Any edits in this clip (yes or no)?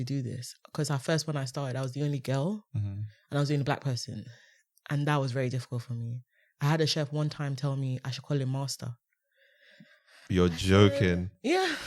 no